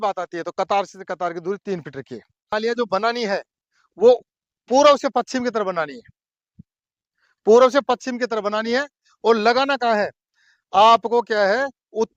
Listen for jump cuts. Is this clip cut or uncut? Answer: cut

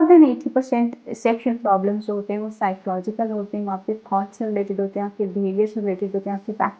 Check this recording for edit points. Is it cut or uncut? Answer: uncut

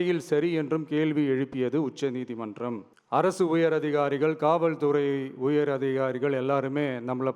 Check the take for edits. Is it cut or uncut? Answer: cut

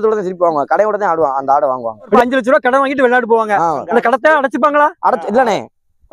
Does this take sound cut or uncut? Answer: cut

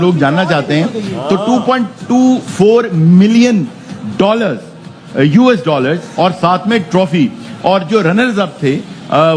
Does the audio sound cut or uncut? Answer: uncut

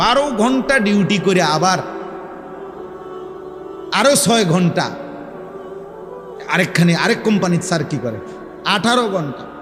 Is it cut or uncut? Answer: uncut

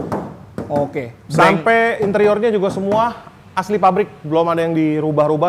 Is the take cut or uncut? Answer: uncut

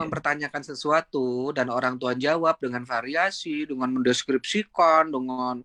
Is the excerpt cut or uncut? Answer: uncut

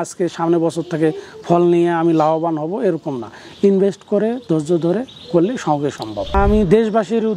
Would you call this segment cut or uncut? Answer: cut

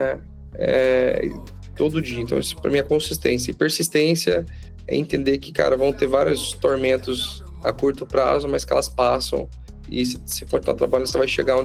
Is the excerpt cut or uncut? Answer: uncut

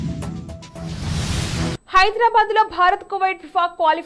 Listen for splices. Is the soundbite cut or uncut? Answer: cut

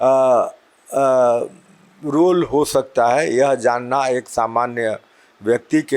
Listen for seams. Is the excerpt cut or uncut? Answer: uncut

